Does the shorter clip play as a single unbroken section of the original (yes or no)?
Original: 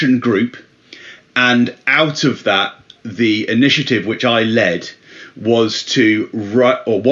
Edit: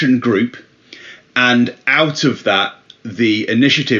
yes